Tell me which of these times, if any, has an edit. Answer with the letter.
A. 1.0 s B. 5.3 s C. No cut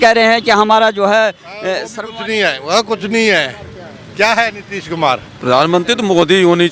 B